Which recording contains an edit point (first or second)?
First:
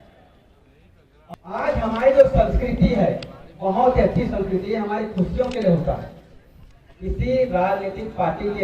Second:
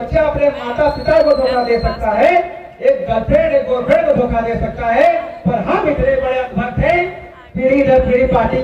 first